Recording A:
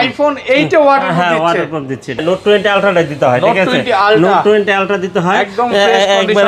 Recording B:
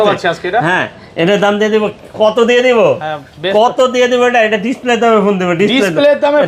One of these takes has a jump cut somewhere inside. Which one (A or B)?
A